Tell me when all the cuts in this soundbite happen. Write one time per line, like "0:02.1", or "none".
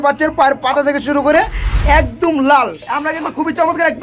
0:02.9